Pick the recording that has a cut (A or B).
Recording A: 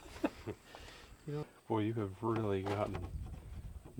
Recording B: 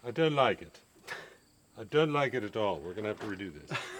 A